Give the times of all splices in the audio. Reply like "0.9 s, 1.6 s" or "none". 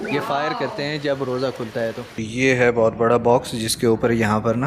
2.2 s